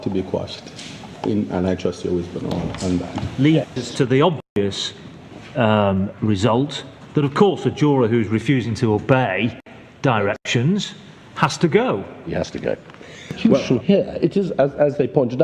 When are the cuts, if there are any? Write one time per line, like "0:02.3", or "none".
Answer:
0:03.2
0:13.4